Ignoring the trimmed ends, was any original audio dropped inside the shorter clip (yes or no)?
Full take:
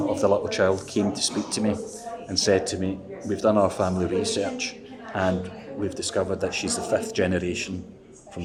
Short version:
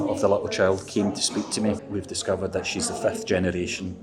yes